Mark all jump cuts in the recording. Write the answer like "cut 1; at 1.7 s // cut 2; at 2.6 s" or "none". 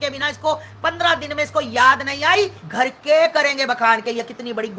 cut 1; at 2.6 s